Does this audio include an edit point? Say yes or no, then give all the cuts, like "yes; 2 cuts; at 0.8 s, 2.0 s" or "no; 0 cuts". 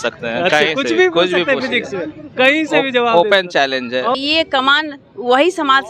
yes; 1 cut; at 4.2 s